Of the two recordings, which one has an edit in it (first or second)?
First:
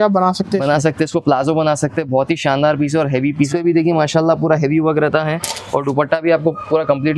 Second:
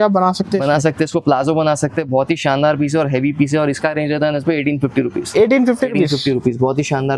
first